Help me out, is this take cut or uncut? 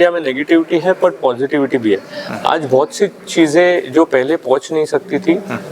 uncut